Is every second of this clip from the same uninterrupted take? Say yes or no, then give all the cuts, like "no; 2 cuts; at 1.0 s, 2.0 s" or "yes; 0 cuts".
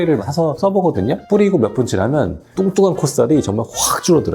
no; 1 cut; at 1.2 s